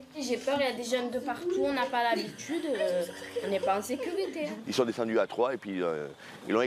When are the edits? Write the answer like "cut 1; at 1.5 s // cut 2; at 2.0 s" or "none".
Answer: cut 1; at 4.6 s